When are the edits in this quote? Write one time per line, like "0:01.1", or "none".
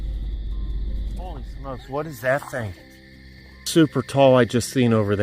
0:01.2